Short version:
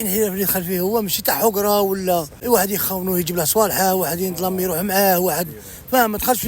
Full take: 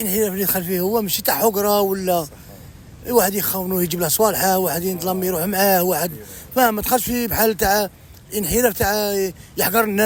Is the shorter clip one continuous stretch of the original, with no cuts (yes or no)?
no